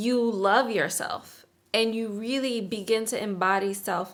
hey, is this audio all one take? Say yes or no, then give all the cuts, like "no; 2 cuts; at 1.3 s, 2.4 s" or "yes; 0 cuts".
yes; 0 cuts